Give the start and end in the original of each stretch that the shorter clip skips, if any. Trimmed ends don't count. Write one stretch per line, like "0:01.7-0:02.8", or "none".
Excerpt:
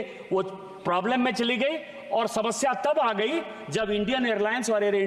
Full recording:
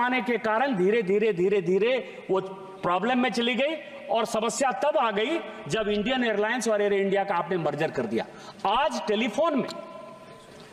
none